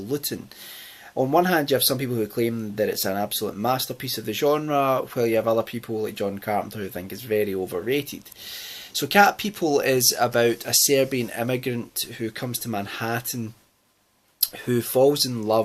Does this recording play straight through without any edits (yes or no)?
yes